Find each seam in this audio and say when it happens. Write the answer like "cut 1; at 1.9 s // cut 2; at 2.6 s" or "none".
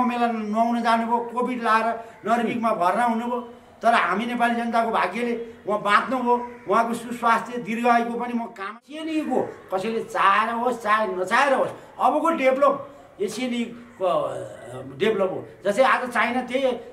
cut 1; at 8.8 s